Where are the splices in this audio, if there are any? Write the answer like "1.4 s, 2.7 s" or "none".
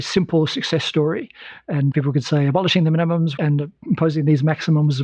1.9 s, 3.3 s